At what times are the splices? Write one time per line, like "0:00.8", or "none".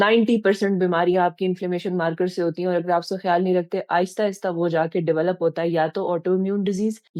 none